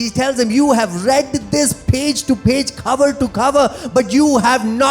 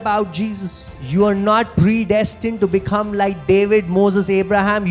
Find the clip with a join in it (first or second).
second